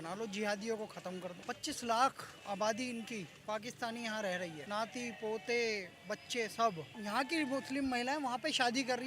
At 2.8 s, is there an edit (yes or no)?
no